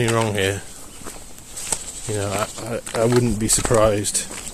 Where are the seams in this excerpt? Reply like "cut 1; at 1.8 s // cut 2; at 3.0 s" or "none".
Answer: none